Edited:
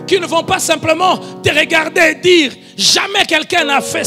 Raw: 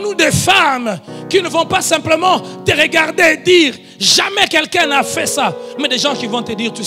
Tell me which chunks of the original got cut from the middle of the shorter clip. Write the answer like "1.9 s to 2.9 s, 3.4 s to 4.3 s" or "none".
none